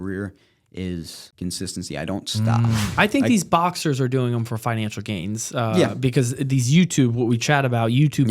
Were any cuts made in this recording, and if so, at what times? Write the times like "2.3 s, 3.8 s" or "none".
1.2 s, 2.9 s